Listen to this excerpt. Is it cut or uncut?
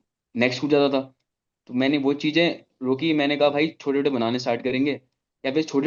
uncut